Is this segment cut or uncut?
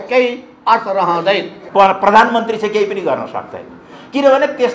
cut